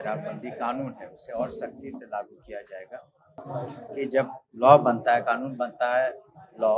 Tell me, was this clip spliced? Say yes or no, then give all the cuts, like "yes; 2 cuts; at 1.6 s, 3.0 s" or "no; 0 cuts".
yes; 1 cut; at 3.3 s